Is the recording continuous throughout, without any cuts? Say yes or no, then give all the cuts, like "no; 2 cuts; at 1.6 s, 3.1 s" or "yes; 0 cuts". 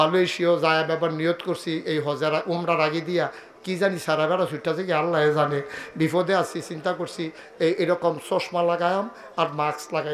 yes; 0 cuts